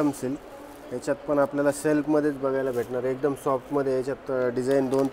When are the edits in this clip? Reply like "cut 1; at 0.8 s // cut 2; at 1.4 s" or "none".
none